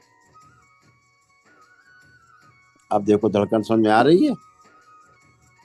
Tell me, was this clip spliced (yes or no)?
yes